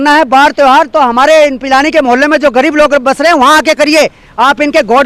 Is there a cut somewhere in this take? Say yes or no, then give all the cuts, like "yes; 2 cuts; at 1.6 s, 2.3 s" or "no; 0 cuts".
no; 0 cuts